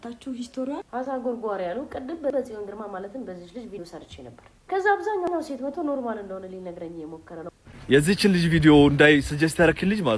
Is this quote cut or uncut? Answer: cut